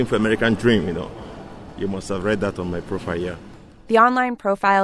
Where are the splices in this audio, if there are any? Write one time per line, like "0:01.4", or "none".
none

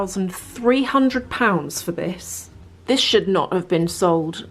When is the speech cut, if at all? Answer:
0:02.5

